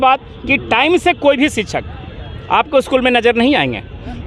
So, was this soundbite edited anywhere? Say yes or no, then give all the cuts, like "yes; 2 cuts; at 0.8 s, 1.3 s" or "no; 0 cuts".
no; 0 cuts